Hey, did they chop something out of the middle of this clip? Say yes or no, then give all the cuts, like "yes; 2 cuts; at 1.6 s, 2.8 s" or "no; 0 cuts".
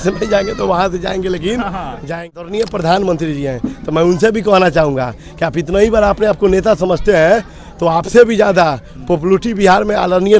yes; 1 cut; at 2.0 s